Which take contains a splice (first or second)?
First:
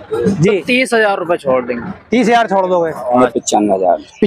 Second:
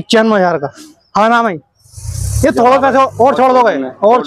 first